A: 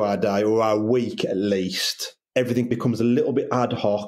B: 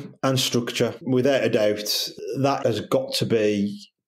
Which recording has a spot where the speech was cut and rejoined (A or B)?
B